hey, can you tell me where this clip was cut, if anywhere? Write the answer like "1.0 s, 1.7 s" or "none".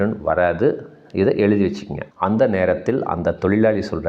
2.0 s